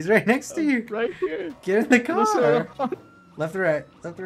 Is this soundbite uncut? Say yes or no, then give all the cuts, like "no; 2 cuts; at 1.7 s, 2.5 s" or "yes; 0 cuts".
no; 1 cut; at 3.1 s